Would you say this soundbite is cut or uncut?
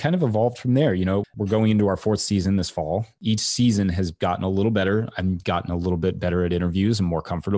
cut